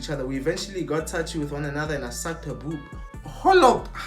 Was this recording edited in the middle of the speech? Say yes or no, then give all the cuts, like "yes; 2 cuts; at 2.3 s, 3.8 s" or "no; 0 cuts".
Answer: no; 0 cuts